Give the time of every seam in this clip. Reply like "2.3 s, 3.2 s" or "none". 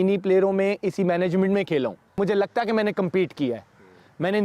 2.2 s